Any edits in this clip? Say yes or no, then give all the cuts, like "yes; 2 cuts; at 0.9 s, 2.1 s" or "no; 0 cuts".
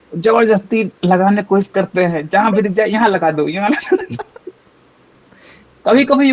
no; 0 cuts